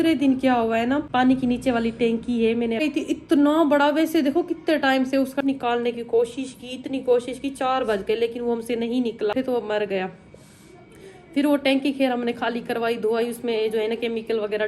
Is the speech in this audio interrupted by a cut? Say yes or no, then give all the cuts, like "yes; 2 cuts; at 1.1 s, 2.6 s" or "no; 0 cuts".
yes; 4 cuts; at 1.1 s, 2.8 s, 5.4 s, 9.3 s